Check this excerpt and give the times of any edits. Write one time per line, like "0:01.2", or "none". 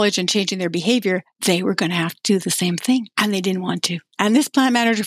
0:01.3
0:03.1
0:04.1